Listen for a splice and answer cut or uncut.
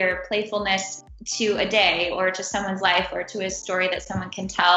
uncut